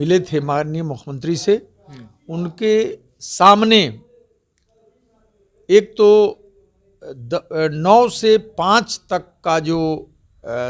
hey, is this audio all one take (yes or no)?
yes